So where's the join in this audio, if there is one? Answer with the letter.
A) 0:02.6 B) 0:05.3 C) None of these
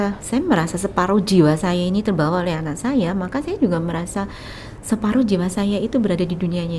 C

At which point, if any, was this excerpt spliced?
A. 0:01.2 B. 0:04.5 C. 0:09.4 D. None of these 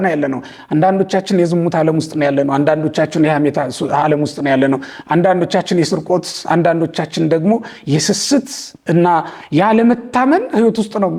D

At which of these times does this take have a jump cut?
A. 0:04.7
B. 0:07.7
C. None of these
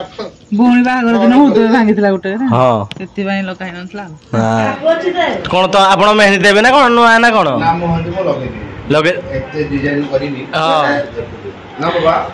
A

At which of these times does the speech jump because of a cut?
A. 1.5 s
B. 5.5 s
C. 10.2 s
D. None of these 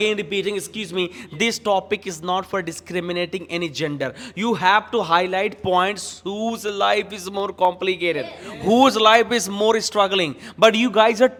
D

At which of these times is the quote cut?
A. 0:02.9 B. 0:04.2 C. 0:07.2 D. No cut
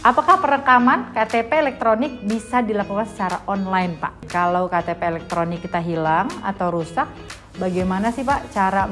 B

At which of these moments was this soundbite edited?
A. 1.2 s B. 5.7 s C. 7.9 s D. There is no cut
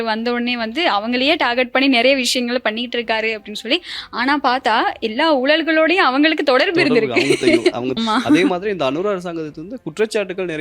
C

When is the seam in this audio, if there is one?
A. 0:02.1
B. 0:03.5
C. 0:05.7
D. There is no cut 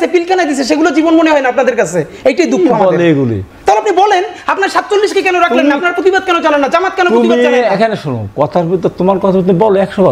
B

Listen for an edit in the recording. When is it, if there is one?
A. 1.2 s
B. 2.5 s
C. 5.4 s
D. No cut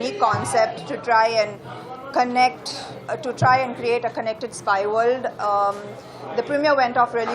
D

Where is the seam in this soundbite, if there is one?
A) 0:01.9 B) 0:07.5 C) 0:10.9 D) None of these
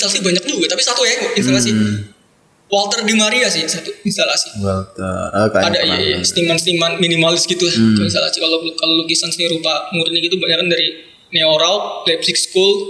D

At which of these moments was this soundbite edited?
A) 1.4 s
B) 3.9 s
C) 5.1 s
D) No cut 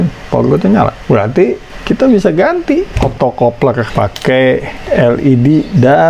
B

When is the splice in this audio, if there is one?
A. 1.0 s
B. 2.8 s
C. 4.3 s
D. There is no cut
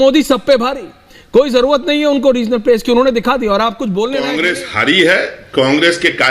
C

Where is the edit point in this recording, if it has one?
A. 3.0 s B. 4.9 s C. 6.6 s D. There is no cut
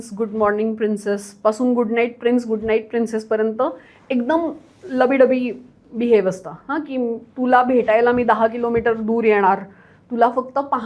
D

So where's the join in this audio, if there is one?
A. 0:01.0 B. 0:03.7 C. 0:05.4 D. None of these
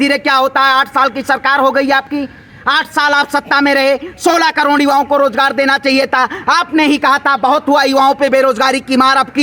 D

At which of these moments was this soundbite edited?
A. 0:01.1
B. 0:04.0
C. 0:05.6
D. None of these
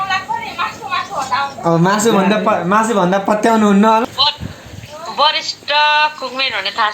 B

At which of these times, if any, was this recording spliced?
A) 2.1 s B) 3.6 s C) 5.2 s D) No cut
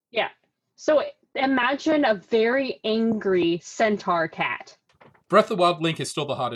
C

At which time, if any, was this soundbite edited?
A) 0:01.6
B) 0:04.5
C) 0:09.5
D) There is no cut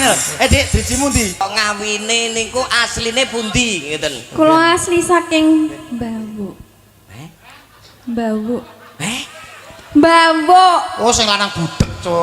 A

